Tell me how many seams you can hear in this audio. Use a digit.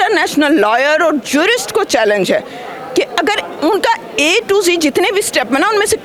0